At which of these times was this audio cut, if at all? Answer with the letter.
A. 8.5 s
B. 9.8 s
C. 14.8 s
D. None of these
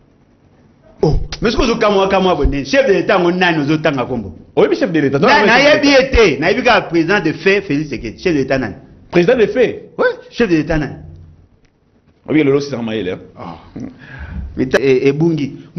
C